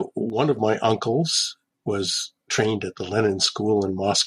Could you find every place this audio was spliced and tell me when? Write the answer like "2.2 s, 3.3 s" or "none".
1.6 s